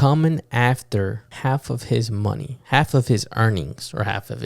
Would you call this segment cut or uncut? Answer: cut